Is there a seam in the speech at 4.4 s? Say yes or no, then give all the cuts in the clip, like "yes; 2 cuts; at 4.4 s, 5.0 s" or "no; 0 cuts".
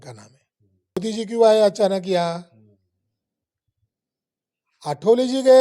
no; 1 cut; at 0.9 s